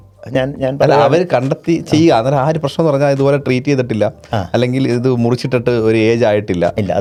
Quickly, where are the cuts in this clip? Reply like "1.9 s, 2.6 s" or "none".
none

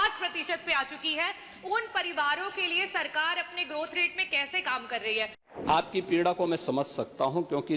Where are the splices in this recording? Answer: 5.4 s

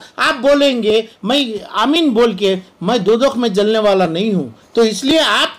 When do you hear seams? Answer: none

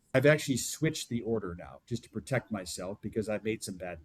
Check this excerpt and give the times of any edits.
none

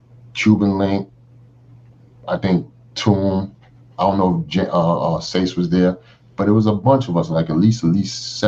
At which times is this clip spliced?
none

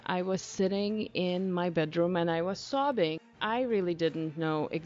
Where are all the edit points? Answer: 3.3 s

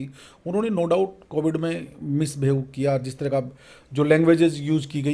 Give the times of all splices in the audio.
none

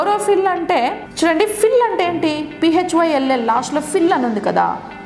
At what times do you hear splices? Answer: 1.0 s

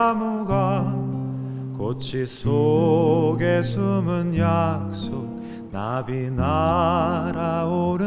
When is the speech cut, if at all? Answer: none

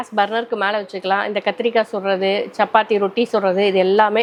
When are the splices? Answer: none

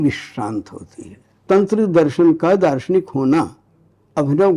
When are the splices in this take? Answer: 1.4 s

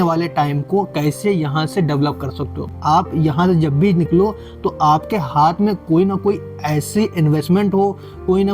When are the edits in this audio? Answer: 2.7 s

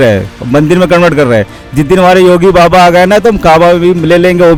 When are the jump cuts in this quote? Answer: none

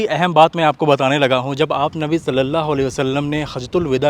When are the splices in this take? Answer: none

